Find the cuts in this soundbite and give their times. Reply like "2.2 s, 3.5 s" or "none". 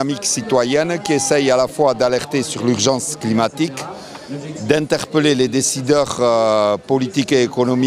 2.3 s